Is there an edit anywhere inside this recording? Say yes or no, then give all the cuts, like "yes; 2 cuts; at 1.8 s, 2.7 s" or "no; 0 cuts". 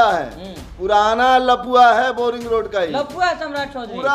no; 0 cuts